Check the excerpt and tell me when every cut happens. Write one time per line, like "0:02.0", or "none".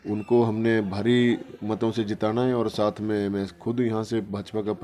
none

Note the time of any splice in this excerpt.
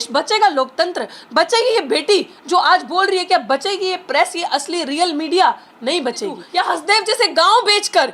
0:06.4

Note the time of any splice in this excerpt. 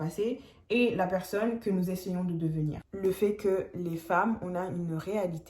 0:02.7

